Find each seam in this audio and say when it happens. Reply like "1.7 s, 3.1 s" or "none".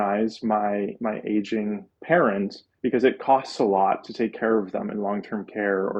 1.9 s, 2.6 s